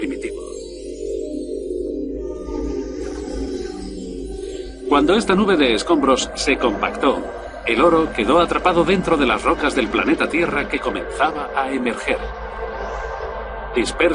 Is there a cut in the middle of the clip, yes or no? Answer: no